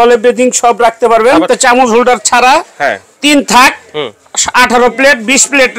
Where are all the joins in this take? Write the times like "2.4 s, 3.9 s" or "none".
1.4 s